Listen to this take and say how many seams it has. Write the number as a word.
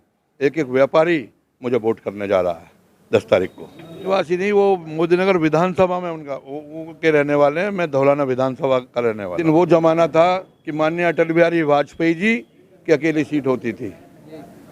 two